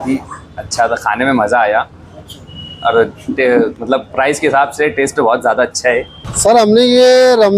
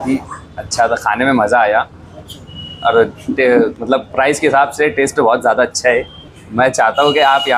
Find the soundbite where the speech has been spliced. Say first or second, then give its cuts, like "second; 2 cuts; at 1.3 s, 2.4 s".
first; 1 cut; at 6.2 s